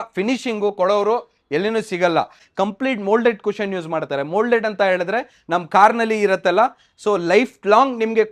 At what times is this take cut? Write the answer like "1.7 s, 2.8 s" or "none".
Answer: 2.4 s